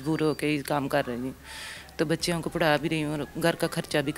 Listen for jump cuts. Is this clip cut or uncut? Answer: uncut